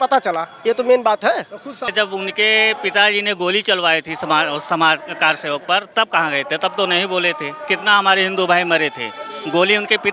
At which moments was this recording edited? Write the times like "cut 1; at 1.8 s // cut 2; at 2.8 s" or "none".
cut 1; at 1.9 s